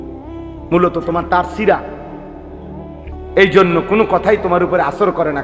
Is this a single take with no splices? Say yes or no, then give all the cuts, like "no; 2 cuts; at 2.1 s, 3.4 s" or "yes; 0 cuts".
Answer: yes; 0 cuts